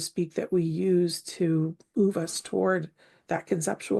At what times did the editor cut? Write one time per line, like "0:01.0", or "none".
none